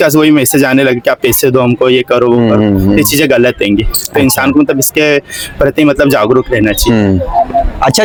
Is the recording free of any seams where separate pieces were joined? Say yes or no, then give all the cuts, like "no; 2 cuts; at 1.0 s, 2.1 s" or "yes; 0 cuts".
yes; 0 cuts